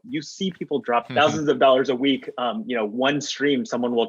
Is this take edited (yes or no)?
yes